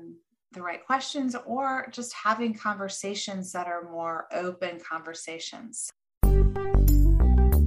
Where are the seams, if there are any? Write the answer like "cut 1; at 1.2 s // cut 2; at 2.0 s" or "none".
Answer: cut 1; at 5.9 s